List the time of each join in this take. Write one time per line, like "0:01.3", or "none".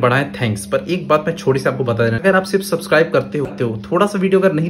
0:02.2
0:03.5